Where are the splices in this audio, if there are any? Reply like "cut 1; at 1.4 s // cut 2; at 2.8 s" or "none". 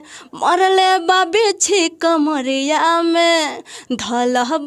none